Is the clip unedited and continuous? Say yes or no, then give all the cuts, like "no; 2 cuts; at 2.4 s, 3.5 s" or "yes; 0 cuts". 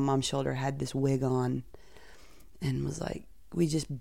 yes; 0 cuts